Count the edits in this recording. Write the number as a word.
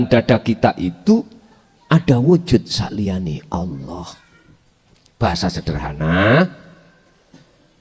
zero